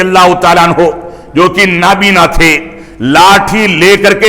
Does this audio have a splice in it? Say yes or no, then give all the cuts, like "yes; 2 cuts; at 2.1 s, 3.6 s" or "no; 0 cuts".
no; 0 cuts